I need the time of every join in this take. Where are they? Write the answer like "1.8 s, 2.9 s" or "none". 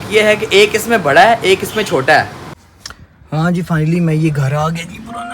2.5 s

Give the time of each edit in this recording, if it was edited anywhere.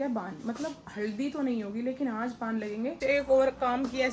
3.0 s

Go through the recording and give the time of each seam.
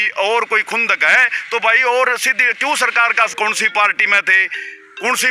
3.3 s

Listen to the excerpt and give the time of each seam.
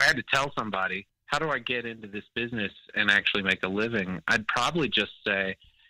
1.1 s

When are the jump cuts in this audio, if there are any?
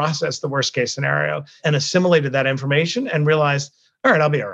1.6 s

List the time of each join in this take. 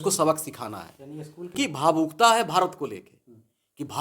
1.5 s

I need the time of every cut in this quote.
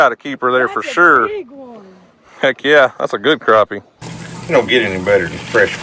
3.9 s

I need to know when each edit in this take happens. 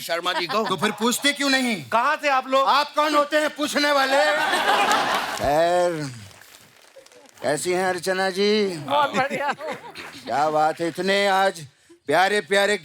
5.3 s

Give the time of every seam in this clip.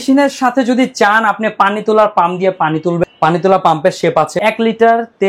3.0 s, 4.4 s

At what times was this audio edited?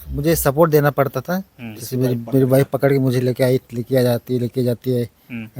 none

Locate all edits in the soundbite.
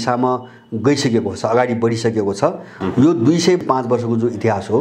2.7 s, 3.6 s

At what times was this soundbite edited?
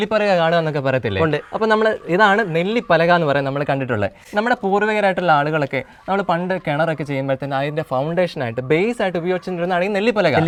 none

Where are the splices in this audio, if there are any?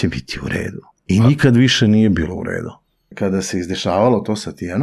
0.9 s, 3.1 s

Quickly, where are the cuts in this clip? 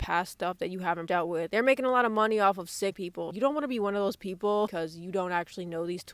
1.1 s, 3.2 s, 4.7 s

